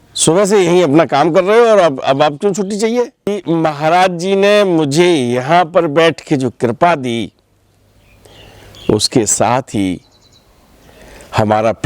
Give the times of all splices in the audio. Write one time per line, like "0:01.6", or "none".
0:03.4